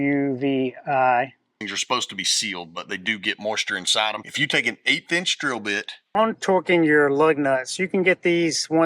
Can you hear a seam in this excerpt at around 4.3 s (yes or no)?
yes